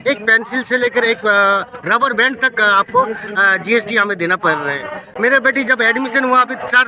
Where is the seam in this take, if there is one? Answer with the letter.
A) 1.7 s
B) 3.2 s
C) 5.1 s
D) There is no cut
C